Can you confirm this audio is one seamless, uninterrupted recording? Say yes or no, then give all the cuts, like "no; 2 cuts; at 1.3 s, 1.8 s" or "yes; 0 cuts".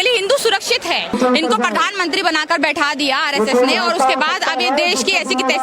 no; 1 cut; at 1.1 s